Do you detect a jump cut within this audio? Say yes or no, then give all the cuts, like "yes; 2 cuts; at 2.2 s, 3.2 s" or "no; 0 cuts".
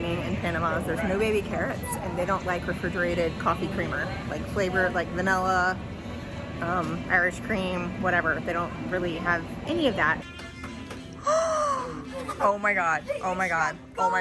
no; 0 cuts